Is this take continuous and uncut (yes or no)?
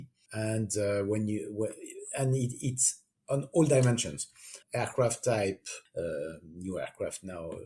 no